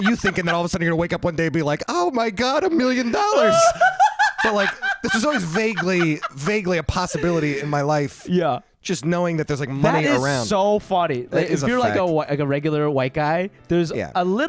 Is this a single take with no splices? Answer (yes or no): yes